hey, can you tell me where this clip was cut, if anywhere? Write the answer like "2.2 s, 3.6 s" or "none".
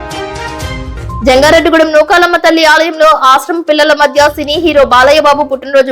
1.2 s